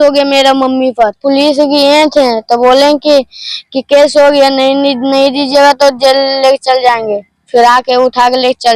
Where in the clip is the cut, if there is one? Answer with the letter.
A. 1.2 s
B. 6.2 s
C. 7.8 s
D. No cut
A